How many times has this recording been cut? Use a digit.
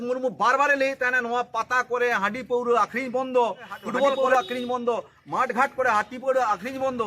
1